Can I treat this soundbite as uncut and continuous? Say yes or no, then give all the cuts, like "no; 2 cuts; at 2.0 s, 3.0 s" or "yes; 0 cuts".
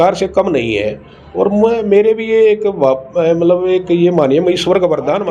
yes; 0 cuts